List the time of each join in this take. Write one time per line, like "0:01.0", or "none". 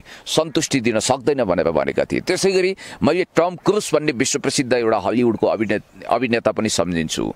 none